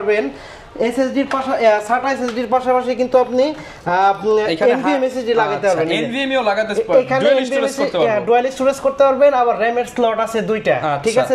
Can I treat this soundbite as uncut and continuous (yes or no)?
yes